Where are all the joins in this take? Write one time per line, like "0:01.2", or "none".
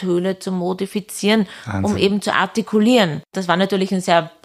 0:03.4